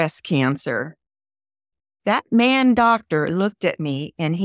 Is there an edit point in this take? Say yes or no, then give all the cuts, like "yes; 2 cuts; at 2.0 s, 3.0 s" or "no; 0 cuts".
yes; 1 cut; at 1.7 s